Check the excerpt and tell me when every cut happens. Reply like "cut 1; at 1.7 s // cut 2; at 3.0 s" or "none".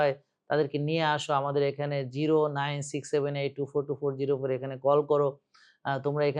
none